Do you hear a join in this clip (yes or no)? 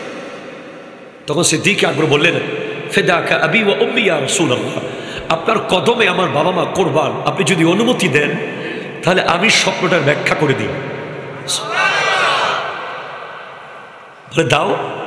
no